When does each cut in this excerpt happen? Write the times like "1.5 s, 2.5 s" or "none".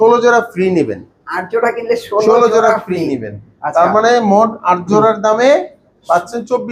none